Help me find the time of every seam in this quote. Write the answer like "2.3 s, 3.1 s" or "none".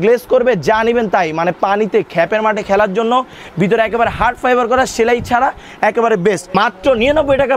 6.4 s